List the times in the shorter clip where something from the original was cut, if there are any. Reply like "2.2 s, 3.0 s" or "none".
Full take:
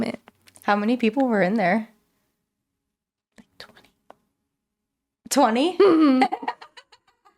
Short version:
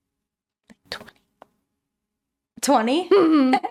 none